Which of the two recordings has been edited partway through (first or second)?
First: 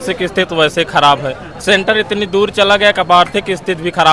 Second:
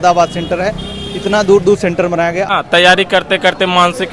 second